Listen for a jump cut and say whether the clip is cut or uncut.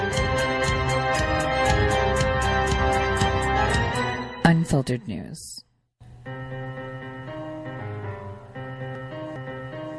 uncut